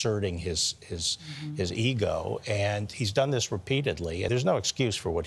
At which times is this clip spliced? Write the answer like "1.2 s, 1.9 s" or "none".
4.3 s